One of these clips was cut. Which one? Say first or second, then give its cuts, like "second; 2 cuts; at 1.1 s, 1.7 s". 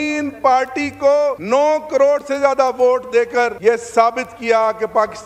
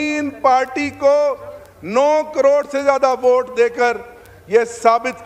first; 2 cuts; at 1.4 s, 3.5 s